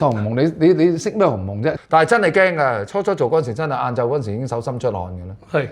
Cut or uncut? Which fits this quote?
cut